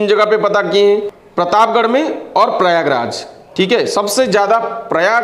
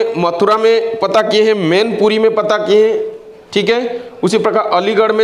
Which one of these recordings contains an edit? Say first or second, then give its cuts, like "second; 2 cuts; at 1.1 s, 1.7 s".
first; 1 cut; at 1.2 s